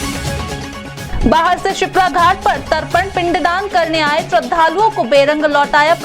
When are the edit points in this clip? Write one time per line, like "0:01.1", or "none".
0:01.0